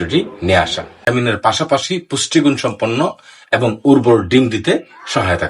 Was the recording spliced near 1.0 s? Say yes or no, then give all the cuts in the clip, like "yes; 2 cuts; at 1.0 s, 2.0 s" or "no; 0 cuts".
yes; 1 cut; at 1.0 s